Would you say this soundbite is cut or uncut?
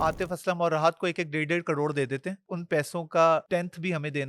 cut